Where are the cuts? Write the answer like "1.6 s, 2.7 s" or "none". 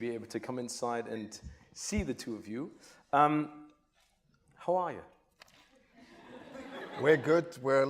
5.6 s